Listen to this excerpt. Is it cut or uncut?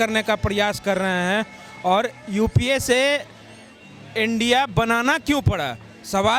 uncut